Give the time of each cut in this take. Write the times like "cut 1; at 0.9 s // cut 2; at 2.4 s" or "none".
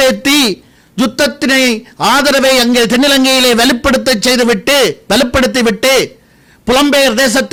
none